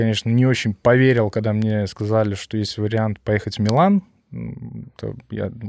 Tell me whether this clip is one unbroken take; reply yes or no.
yes